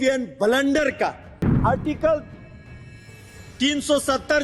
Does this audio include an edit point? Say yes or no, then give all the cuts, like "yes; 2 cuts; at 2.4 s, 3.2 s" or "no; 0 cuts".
yes; 1 cut; at 1.5 s